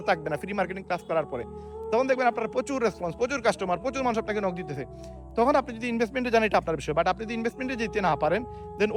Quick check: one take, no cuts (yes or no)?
yes